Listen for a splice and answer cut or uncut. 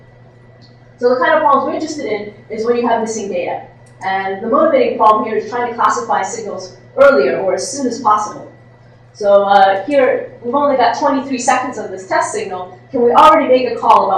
uncut